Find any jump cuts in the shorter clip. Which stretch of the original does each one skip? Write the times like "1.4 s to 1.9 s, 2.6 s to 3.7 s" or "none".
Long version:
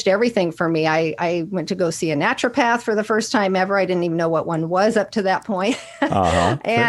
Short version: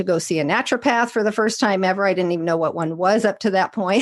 none